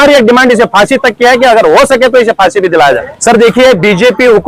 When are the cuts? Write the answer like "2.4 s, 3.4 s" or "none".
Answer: 3.1 s